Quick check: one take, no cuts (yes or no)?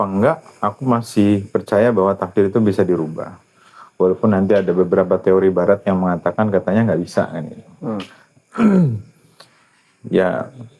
yes